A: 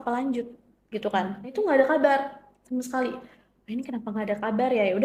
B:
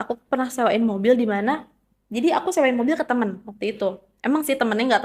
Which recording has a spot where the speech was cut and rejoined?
A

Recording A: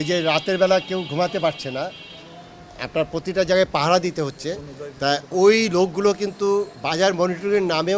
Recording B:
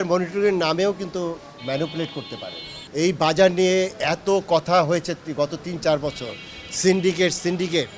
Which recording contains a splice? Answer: B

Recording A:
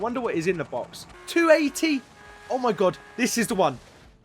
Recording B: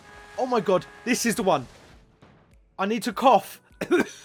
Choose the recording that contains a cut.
A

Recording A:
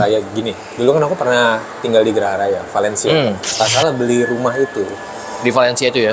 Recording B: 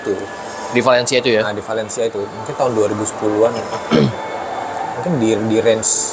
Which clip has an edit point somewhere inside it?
A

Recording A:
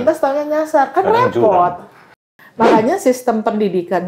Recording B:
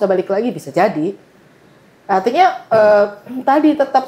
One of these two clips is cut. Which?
A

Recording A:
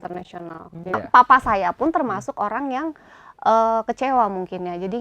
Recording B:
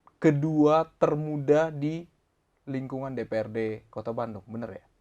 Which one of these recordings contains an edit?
A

